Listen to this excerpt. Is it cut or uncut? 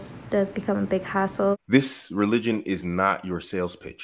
cut